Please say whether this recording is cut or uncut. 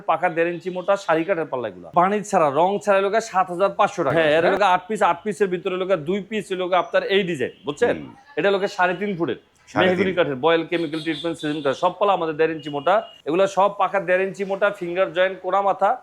cut